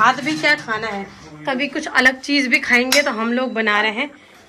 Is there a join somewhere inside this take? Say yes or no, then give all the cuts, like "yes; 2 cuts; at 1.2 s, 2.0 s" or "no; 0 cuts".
no; 0 cuts